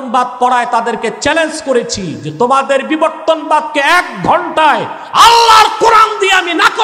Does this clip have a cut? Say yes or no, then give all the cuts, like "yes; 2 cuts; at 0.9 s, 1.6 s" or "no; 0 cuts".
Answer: no; 0 cuts